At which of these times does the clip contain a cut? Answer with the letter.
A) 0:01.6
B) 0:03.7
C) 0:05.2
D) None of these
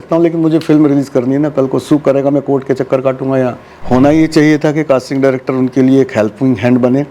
B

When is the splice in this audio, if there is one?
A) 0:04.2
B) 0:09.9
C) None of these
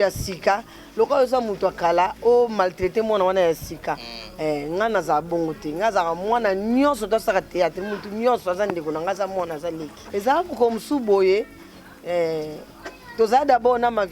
B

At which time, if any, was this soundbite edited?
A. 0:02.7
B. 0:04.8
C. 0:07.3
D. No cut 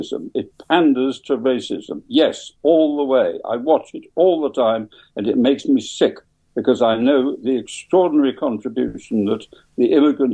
D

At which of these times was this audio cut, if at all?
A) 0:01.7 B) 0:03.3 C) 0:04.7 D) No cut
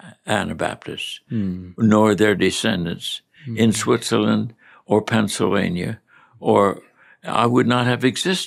D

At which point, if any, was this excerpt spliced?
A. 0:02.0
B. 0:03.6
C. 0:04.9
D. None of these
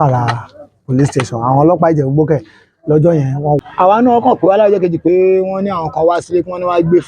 B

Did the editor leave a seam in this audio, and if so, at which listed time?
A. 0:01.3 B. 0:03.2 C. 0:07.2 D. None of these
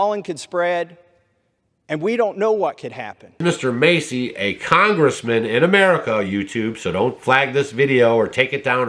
B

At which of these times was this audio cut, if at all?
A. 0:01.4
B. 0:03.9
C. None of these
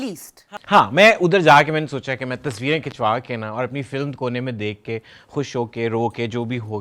C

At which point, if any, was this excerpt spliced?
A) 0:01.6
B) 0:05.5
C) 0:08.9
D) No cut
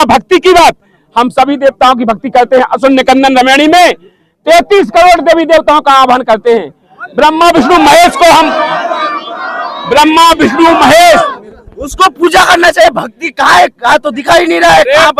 D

